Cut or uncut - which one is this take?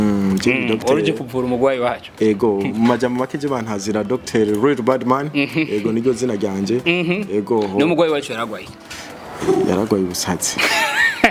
uncut